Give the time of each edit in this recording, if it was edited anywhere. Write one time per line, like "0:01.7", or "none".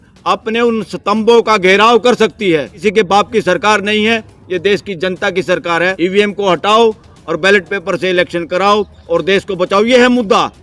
0:02.7
0:05.9